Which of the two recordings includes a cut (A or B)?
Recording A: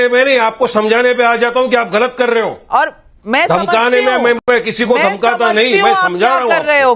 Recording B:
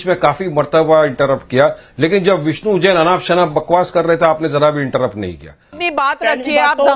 B